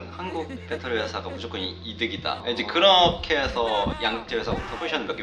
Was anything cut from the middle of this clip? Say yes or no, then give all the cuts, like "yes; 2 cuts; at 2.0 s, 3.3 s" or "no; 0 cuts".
no; 0 cuts